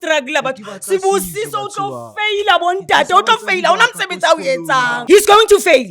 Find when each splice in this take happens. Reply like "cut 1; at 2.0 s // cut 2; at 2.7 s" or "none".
cut 1; at 5.0 s